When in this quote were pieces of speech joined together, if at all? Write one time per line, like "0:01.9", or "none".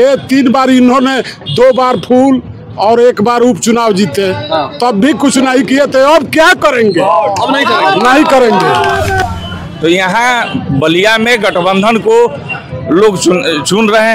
0:09.2

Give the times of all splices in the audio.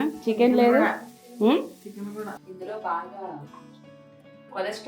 0:02.2

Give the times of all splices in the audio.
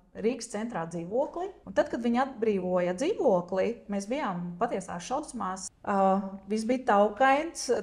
0:01.6
0:05.6

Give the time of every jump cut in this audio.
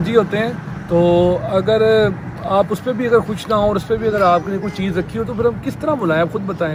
none

